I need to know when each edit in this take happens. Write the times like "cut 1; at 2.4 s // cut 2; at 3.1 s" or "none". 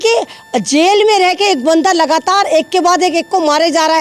none